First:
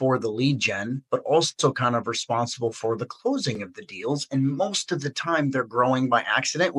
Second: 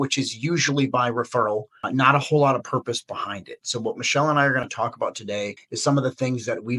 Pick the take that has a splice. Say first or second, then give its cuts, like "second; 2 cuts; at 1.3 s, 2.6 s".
second; 2 cuts; at 1.8 s, 5.2 s